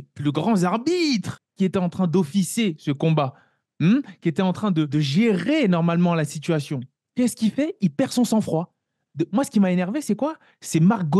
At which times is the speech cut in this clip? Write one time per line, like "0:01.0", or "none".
0:01.4
0:04.9

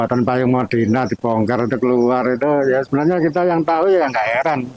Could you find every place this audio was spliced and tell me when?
none

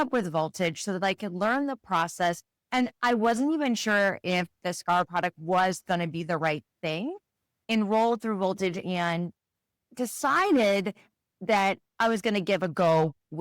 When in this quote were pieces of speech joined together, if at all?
0:05.1
0:07.6

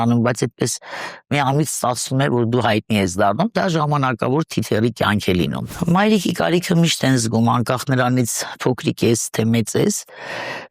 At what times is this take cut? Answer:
0:05.7

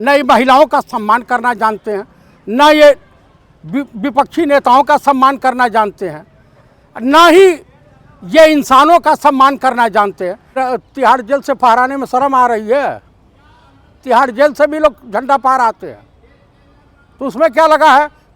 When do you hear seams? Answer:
0:10.5

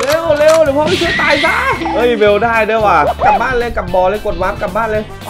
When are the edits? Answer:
0:01.8
0:03.3

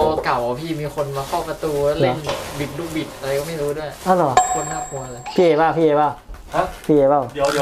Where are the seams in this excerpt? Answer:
none

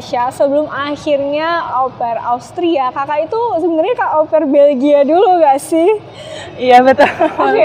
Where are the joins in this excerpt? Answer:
0:01.7

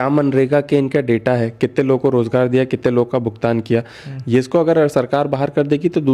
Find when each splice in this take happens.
none

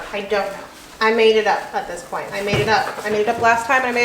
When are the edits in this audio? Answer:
0:02.2

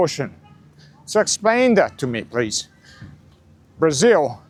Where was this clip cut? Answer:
none

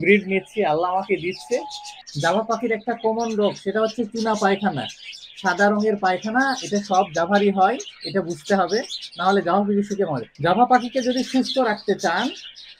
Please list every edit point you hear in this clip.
0:02.0
0:10.3

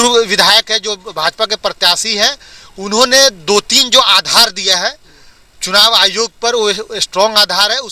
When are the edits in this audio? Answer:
none

